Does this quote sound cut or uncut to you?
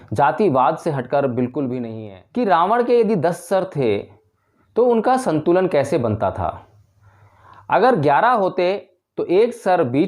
cut